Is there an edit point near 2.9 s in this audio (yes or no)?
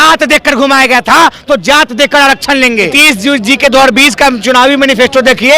yes